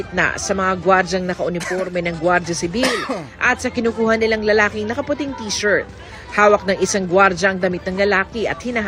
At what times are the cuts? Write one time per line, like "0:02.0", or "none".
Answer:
none